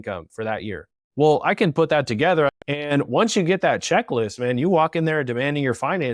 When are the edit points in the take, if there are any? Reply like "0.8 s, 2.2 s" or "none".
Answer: 2.5 s